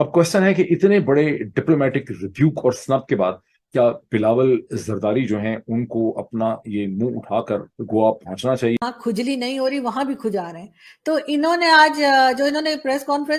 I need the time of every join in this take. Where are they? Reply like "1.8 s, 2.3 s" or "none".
8.8 s